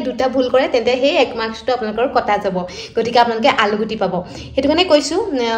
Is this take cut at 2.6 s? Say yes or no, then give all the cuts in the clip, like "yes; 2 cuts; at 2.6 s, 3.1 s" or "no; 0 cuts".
no; 0 cuts